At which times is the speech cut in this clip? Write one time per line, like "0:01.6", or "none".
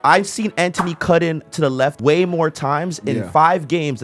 0:02.0